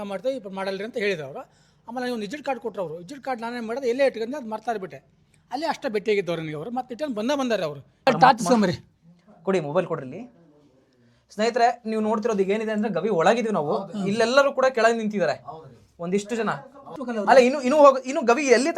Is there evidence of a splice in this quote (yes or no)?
yes